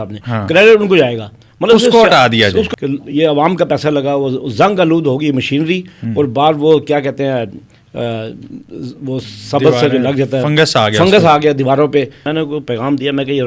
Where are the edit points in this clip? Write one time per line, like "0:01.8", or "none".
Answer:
0:02.7
0:12.2